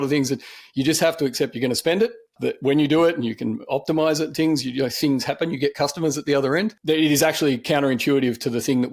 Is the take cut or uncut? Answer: cut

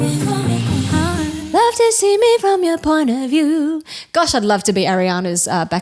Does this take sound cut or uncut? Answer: cut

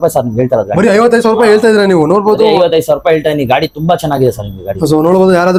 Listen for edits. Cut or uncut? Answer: uncut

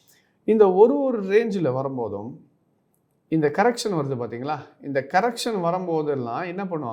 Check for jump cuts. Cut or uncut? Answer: uncut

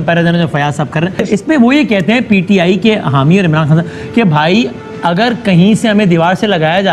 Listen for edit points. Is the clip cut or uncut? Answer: cut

